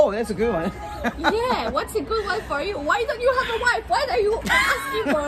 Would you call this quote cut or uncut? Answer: uncut